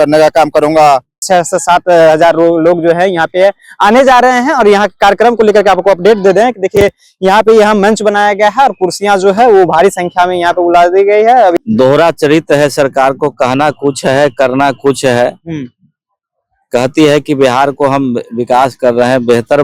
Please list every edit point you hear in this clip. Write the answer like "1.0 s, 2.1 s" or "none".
1.1 s, 11.5 s